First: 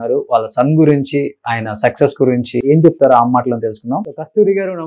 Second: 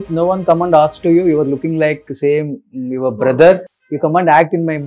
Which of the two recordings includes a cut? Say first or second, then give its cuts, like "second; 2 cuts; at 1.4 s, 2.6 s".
first; 1 cut; at 2.6 s